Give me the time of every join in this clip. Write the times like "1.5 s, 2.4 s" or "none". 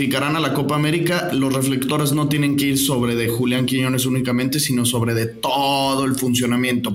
none